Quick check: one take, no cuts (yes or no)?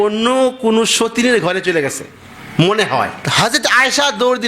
yes